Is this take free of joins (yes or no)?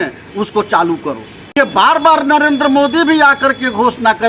no